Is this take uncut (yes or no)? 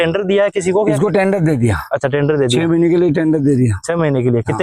yes